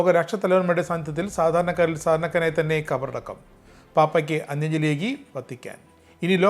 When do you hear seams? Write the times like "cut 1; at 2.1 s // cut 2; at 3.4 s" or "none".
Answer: none